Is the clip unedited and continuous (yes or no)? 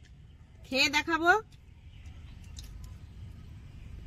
no